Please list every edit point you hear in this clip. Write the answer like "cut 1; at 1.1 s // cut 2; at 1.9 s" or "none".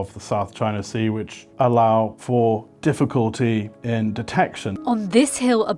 cut 1; at 4.7 s